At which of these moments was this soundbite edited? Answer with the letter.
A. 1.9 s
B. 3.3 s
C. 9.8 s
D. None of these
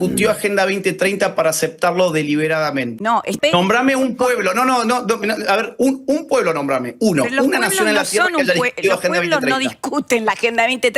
B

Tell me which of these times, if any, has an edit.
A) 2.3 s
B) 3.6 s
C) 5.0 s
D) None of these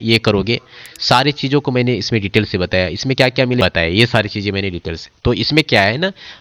B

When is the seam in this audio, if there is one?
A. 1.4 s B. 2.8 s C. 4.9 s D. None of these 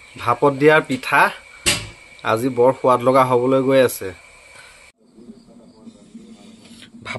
C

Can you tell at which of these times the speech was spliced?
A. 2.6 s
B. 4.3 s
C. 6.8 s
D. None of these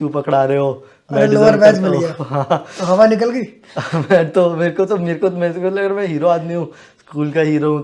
D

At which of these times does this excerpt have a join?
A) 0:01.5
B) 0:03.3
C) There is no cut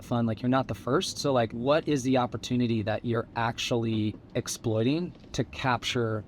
A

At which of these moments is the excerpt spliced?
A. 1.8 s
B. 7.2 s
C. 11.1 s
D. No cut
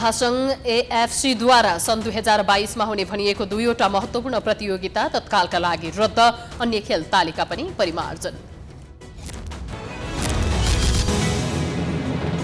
C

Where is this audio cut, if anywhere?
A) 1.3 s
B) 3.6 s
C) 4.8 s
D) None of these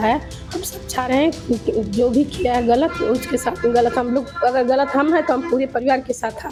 D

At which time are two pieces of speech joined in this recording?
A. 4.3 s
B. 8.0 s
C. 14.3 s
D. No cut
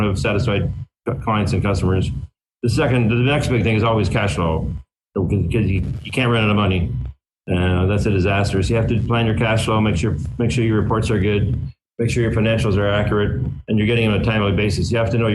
D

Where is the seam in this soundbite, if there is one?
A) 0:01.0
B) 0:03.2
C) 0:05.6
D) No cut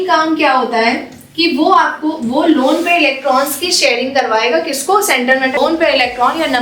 C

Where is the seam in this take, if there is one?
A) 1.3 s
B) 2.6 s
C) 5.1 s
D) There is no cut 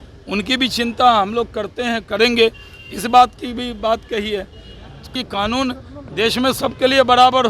C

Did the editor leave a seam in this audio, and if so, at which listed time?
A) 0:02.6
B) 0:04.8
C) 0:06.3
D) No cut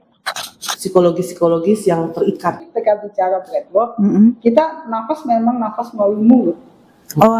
A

